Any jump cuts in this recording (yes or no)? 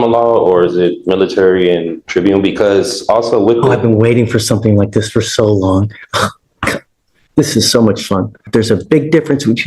yes